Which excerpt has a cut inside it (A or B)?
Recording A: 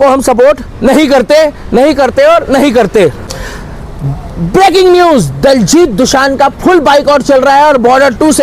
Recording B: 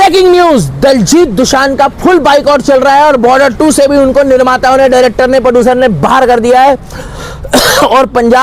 A